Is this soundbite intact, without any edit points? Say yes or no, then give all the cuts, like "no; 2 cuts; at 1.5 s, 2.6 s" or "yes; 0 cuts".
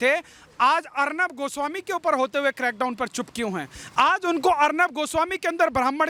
yes; 0 cuts